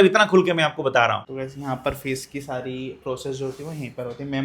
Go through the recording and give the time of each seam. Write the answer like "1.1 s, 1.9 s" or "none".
1.3 s